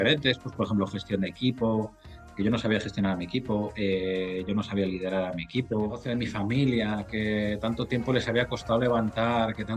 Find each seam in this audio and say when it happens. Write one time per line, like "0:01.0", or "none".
0:06.0